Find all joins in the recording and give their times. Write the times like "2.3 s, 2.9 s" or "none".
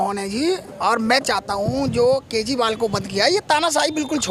none